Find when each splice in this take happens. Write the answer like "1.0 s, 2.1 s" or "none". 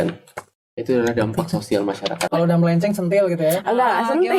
2.2 s